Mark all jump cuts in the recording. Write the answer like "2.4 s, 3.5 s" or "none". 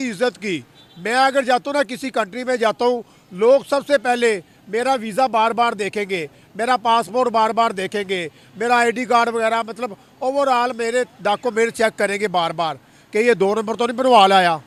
none